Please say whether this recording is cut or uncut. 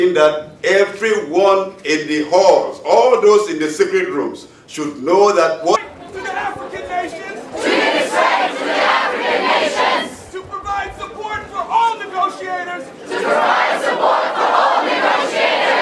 uncut